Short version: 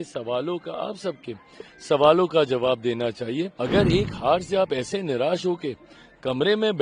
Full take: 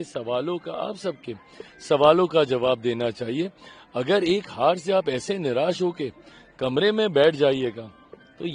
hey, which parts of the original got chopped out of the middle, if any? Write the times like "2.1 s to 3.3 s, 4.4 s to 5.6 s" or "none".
3.6 s to 3.9 s